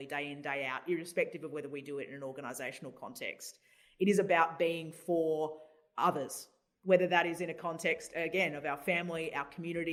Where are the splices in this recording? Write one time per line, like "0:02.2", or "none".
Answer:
none